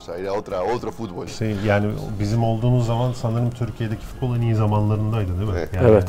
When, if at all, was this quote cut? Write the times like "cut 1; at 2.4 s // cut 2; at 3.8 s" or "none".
none